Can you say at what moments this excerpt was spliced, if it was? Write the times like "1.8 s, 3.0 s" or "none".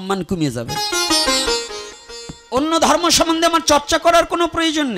2.0 s

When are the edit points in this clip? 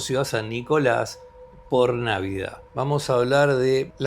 2.6 s

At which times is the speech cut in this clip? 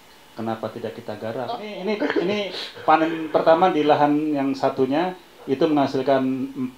1.7 s

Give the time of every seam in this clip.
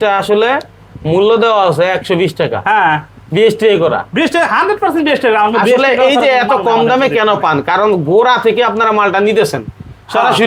none

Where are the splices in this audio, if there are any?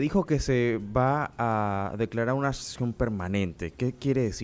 none

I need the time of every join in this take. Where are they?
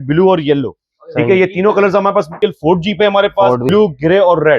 2.3 s, 3.7 s

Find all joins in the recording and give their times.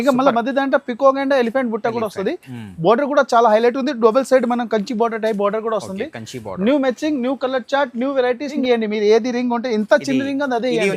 8.6 s

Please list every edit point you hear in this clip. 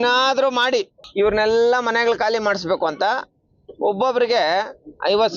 1.0 s

